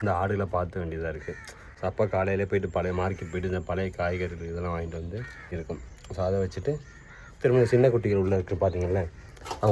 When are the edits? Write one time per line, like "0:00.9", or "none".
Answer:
0:05.6